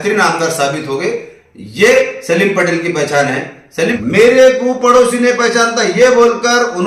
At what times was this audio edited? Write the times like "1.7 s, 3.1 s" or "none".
4.0 s